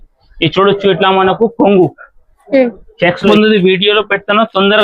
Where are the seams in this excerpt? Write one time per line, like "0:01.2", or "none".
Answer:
0:03.3